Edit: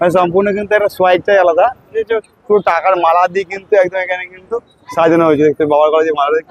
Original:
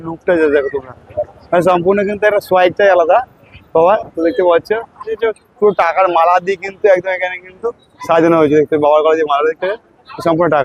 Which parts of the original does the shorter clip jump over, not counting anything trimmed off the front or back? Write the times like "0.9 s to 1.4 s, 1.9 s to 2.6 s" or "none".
3.4 s to 5.0 s